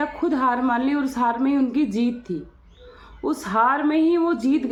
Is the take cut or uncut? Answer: uncut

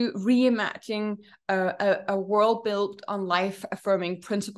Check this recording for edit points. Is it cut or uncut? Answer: uncut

